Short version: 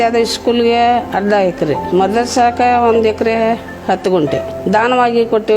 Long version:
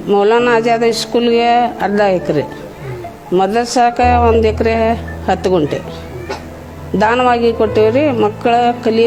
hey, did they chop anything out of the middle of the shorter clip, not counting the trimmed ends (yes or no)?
yes